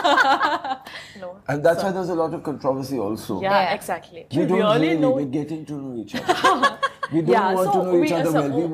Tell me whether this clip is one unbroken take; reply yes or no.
no